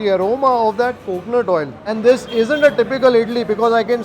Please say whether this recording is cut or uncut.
cut